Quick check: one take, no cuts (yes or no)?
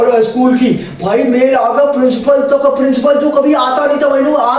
yes